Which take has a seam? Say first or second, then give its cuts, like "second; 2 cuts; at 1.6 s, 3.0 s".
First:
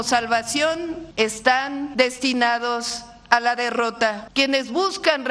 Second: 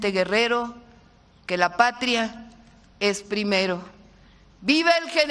first; 3 cuts; at 1.0 s, 1.9 s, 4.2 s